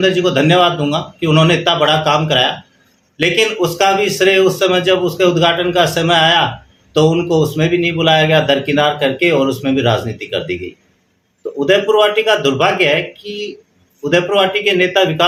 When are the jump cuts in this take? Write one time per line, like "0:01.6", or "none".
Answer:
none